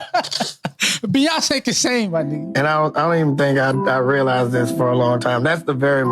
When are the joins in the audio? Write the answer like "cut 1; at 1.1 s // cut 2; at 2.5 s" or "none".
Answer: cut 1; at 2.3 s